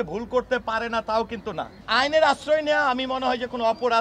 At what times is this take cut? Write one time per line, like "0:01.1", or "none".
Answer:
0:01.8